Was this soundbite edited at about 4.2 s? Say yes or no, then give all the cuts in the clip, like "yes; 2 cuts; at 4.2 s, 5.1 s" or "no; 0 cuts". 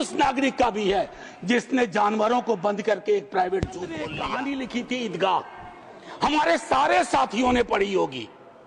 yes; 1 cut; at 4.2 s